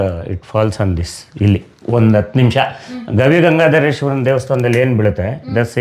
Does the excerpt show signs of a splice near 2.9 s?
no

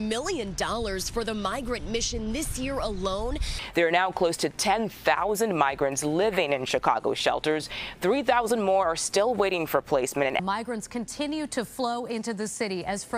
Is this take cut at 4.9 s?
no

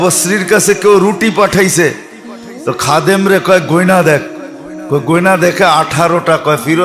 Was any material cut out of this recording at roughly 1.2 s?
no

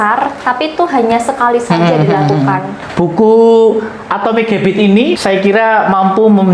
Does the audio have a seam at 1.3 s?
no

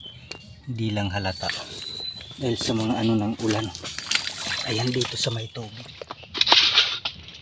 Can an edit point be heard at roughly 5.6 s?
yes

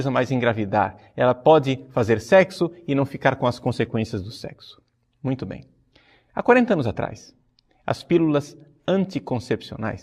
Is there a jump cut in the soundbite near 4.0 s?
no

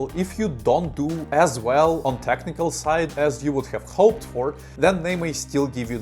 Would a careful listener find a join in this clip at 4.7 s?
yes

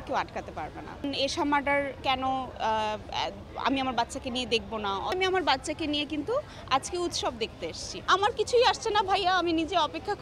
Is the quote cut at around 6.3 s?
no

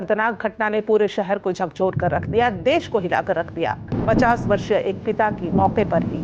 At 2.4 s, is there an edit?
no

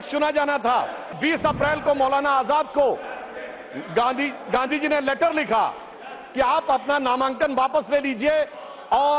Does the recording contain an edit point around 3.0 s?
no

